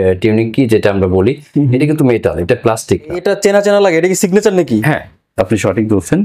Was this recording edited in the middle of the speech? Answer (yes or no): yes